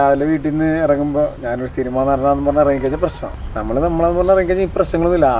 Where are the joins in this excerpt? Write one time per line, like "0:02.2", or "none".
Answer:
0:03.3

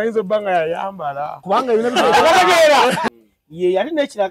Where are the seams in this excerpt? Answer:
0:03.1

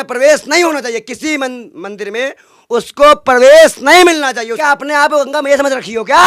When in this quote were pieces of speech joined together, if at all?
0:04.6

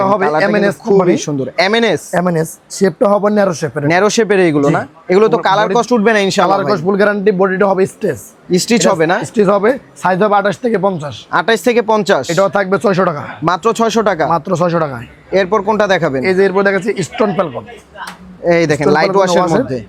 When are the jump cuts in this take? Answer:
none

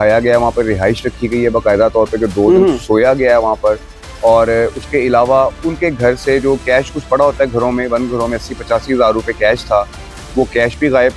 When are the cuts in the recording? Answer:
none

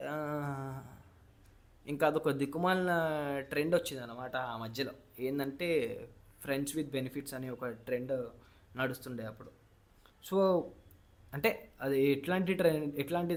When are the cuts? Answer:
none

